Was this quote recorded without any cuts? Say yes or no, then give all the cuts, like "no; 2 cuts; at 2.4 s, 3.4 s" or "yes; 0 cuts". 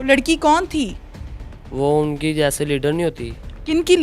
yes; 0 cuts